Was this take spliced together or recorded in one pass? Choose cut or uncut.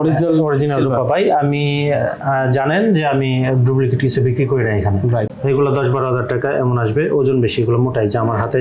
cut